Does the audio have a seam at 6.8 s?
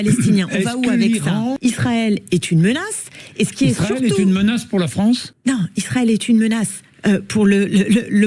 no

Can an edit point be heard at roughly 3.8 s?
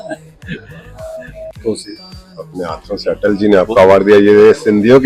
no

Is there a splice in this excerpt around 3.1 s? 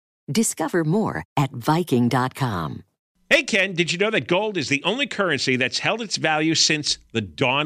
yes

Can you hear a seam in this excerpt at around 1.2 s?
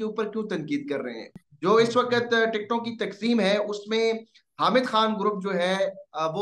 yes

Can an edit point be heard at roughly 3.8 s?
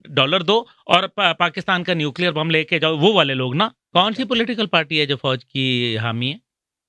yes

